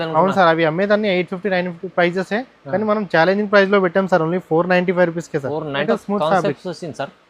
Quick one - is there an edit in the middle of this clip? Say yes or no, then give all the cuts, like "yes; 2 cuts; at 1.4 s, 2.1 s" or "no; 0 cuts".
yes; 1 cut; at 5.8 s